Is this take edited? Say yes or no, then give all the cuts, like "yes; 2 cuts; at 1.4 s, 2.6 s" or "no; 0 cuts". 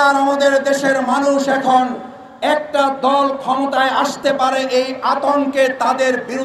no; 0 cuts